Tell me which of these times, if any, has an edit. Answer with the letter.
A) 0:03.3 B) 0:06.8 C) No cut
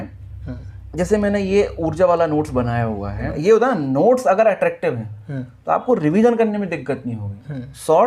A